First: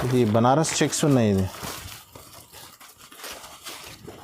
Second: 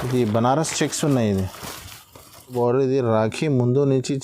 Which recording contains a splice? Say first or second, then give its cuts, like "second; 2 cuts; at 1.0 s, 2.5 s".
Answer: second; 1 cut; at 2.5 s